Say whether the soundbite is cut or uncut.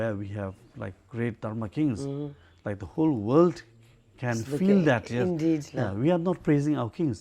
uncut